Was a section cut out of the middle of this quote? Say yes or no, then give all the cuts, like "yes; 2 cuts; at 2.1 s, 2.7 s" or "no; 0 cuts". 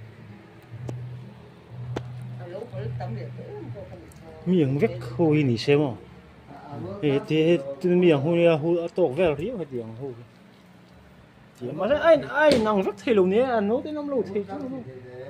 no; 0 cuts